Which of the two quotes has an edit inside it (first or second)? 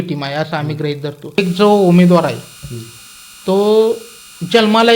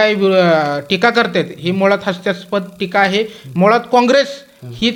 first